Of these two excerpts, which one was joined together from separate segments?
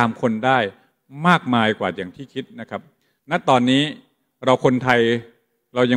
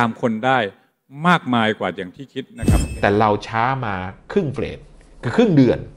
second; 1 cut; at 3.0 s

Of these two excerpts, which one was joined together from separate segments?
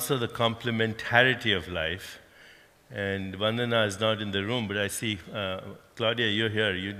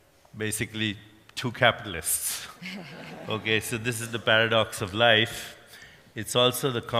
second; 1 cut; at 3.3 s

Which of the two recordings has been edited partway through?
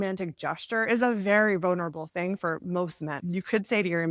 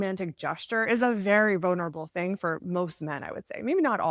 first; 1 cut; at 3.2 s

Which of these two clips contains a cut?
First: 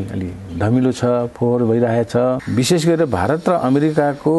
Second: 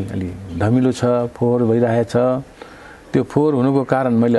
first; 1 cut; at 2.4 s

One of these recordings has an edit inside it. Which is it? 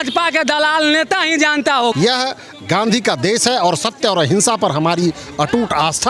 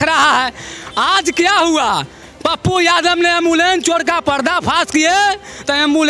first; 1 cut; at 1.9 s

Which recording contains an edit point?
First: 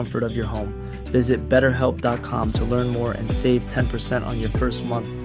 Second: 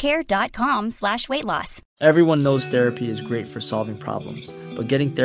second; 1 cut; at 1.8 s

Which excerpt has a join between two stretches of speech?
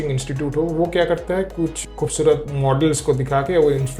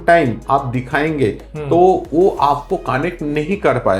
first; 2 cuts; at 1.8 s, 2.5 s

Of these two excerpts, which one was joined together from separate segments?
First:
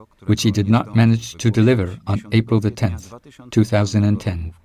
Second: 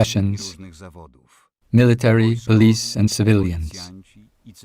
second; 1 cut; at 3.7 s

